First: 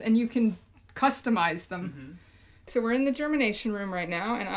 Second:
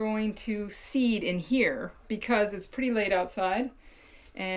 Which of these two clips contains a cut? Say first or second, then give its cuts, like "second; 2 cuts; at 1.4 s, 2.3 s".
first; 1 cut; at 2.7 s